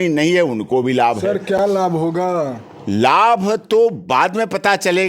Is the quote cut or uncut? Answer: uncut